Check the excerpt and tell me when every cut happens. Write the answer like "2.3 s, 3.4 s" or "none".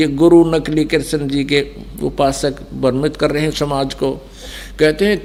none

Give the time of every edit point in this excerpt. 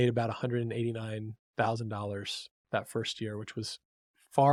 none

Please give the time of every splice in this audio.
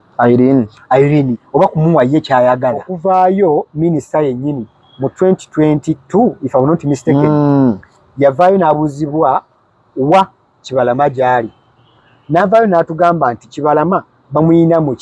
2.9 s

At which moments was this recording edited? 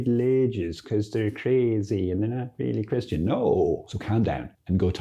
3.8 s

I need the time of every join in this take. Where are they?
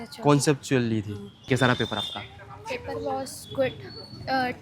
1.3 s

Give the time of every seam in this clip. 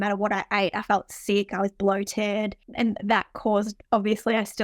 2.6 s

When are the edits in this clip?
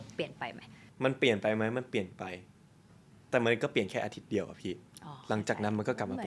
none

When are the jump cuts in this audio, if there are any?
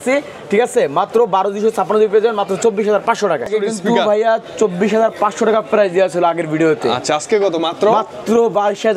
3.5 s

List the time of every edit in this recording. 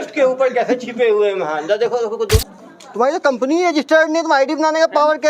2.4 s

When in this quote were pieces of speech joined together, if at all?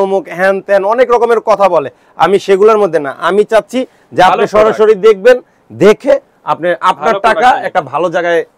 none

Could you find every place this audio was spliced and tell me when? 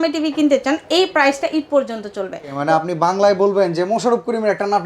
2.6 s

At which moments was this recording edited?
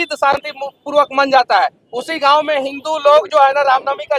none

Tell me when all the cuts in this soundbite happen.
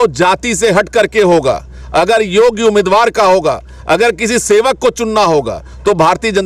none

